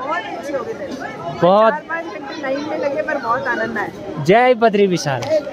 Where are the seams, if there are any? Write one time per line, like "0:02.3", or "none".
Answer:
none